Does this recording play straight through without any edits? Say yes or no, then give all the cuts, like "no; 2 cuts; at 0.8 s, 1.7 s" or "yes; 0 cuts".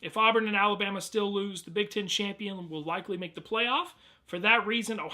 no; 1 cut; at 4.2 s